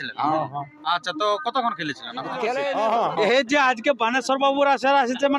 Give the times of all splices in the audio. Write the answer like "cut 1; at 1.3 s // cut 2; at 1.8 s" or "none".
cut 1; at 2.6 s